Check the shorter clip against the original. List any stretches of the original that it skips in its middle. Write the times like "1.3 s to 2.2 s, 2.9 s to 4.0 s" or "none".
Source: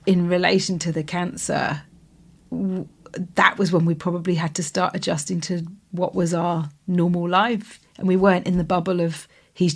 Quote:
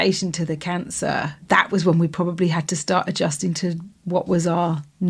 1.9 s to 3.3 s